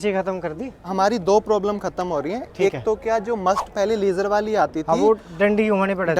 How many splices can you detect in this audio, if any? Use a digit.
0